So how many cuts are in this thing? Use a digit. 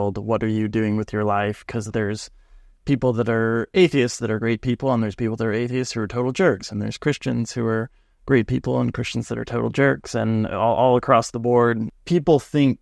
1